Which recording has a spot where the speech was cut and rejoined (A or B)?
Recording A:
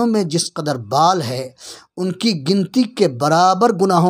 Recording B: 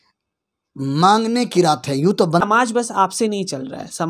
B